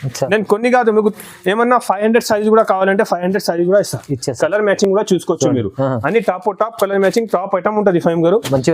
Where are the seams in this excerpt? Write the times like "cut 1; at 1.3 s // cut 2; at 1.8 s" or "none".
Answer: none

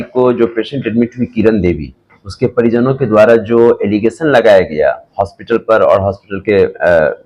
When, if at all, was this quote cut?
none

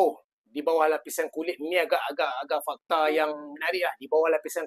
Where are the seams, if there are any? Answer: none

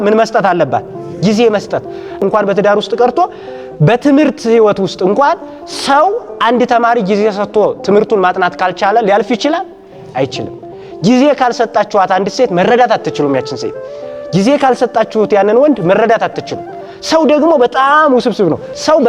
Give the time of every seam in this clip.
cut 1; at 2.2 s

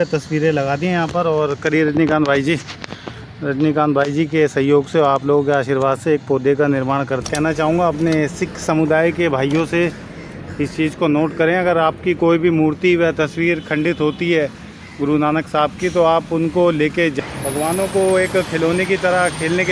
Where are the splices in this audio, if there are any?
cut 1; at 7.2 s // cut 2; at 17.2 s

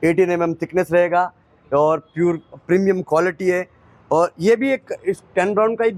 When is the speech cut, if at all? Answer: none

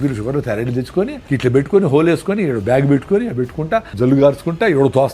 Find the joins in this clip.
cut 1; at 1.2 s // cut 2; at 3.9 s

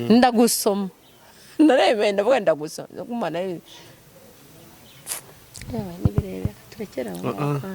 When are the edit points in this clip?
none

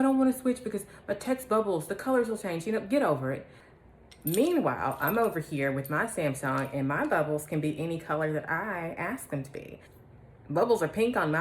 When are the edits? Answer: cut 1; at 3.6 s // cut 2; at 9.9 s

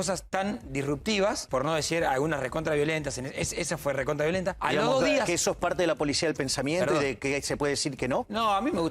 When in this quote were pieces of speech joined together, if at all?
cut 1; at 1.4 s // cut 2; at 4.6 s

